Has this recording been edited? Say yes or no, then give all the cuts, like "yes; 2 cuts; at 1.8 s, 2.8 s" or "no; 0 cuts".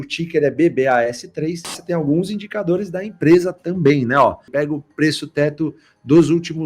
yes; 2 cuts; at 1.8 s, 4.4 s